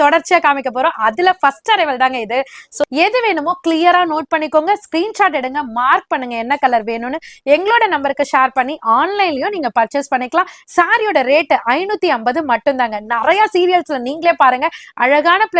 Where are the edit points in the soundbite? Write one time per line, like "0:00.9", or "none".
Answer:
0:02.8
0:10.6